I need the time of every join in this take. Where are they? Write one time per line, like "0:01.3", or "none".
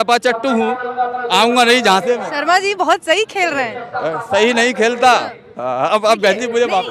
none